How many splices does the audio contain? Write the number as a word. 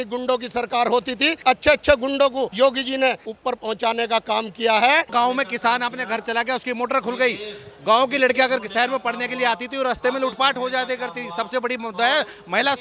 four